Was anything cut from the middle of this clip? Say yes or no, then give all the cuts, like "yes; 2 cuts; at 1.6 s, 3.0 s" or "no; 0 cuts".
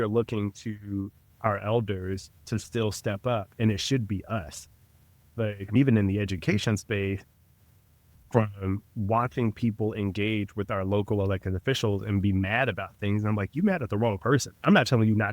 yes; 1 cut; at 5.8 s